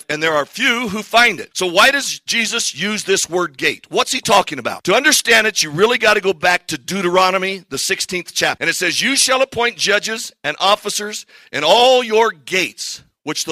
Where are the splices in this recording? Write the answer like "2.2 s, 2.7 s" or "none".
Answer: 1.4 s, 4.7 s, 8.6 s